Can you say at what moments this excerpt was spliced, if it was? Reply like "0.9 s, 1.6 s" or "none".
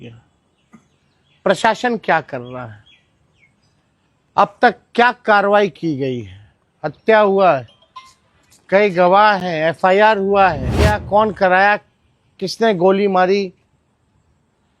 10.7 s